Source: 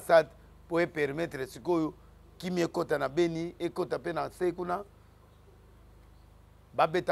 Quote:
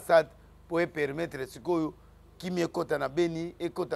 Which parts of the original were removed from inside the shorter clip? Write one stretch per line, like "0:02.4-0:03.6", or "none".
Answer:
none